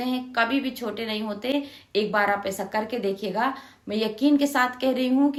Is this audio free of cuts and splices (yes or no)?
yes